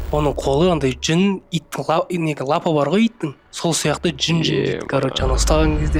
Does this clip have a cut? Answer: no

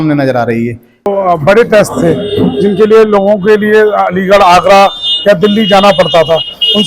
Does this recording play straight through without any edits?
no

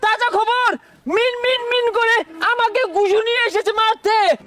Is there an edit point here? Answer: no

